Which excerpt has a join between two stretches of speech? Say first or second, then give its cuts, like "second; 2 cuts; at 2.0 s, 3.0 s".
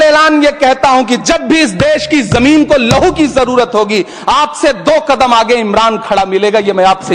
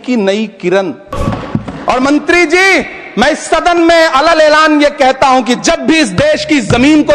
second; 1 cut; at 1.1 s